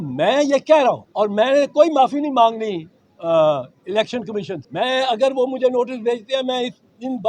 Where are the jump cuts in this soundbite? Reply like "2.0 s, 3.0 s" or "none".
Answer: 1.1 s, 4.6 s